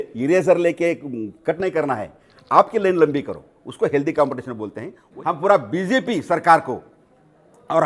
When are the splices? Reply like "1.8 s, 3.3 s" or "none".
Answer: 5.0 s

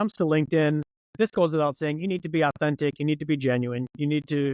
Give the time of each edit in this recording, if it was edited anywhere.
1.0 s

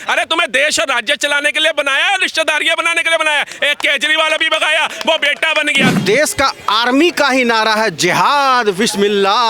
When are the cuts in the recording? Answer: 6.0 s

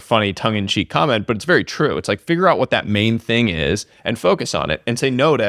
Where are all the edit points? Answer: none

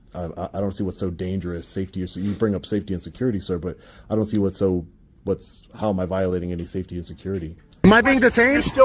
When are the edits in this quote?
7.8 s

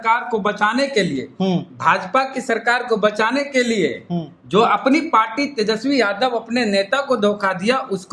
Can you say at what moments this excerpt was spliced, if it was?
none

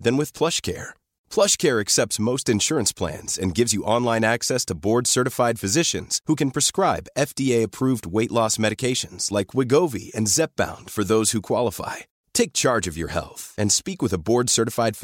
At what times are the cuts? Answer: none

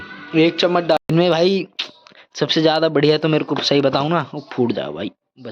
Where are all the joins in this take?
1.0 s

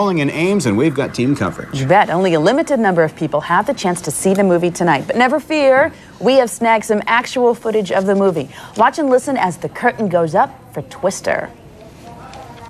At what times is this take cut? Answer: 6.5 s

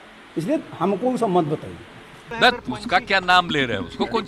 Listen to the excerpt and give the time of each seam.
2.1 s

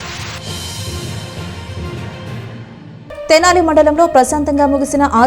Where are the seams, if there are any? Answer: 2.9 s

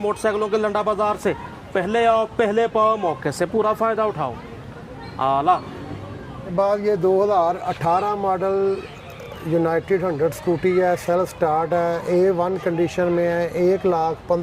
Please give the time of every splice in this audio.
none

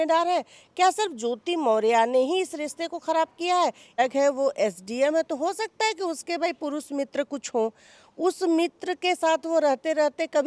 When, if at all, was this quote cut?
4.0 s

